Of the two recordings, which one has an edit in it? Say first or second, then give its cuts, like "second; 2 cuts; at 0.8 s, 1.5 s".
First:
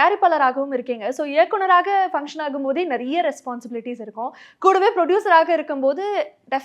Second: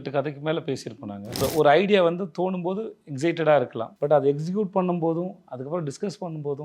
second; 2 cuts; at 1.4 s, 3.8 s